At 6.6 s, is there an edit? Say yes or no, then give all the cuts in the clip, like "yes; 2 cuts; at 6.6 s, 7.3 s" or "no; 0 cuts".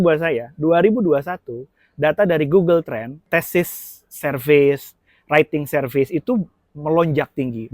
no; 1 cut; at 3.1 s